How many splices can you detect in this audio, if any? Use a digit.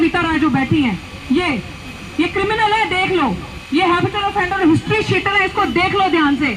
0